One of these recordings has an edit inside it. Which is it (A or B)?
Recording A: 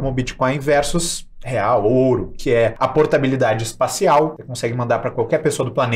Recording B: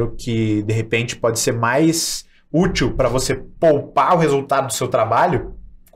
A